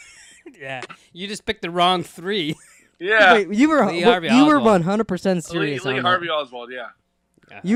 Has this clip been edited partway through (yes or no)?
no